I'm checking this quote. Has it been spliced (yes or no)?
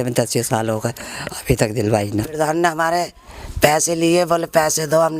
yes